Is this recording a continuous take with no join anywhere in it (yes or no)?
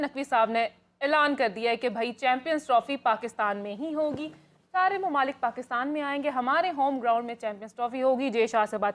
yes